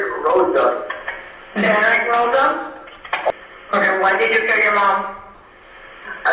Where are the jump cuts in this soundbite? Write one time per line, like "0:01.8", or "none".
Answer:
0:03.3
0:05.4